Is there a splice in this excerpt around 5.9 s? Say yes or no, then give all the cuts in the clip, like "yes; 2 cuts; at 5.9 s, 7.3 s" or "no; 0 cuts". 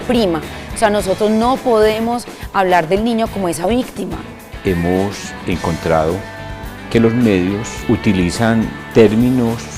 no; 2 cuts; at 4.4 s, 7.8 s